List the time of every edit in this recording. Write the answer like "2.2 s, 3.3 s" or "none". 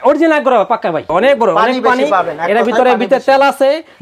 1.1 s